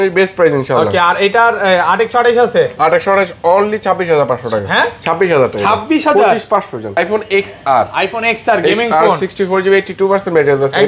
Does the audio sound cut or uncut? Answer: cut